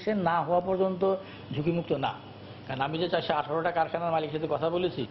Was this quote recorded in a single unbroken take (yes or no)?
yes